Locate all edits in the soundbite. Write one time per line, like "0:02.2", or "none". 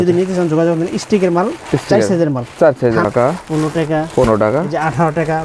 0:03.0